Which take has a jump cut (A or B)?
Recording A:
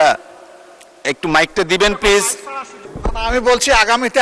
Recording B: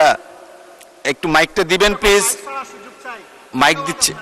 A